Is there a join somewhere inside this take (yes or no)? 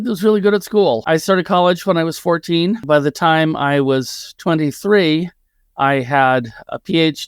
yes